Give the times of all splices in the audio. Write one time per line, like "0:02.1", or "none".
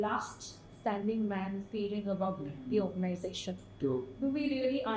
none